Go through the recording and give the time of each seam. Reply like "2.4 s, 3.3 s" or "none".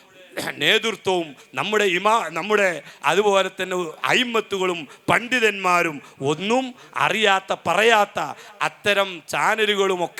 none